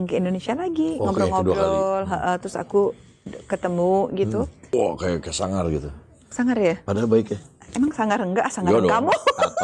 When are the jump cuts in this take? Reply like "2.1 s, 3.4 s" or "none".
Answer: 4.7 s

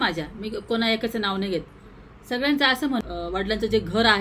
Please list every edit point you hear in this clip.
2.9 s

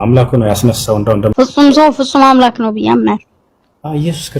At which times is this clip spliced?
1.3 s

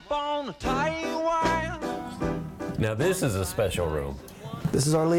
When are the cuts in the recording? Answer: 2.6 s

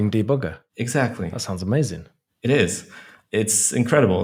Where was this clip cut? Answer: none

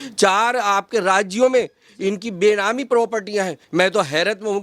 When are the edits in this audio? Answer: 3.6 s

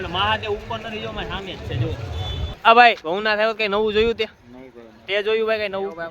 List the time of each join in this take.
2.6 s

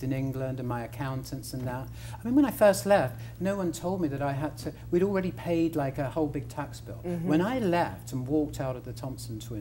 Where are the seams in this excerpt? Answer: none

